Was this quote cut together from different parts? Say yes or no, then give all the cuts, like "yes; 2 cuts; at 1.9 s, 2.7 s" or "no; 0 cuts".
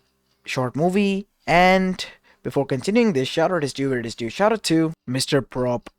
yes; 1 cut; at 5.0 s